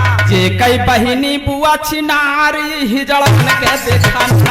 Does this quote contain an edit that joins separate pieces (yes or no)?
no